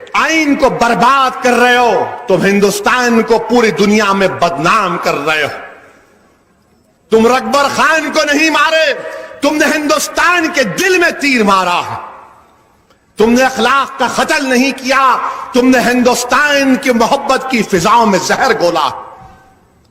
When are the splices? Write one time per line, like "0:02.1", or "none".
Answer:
0:16.8